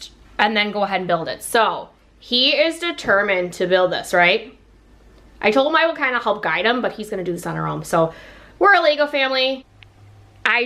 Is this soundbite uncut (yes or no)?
no